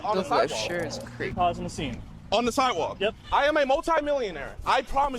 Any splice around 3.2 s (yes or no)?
yes